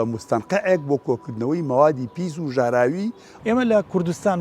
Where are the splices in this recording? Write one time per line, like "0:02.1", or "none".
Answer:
0:03.2